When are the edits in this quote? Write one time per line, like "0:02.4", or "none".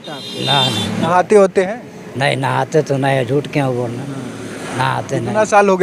0:01.0